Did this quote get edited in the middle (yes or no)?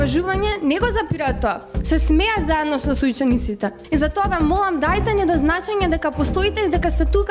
yes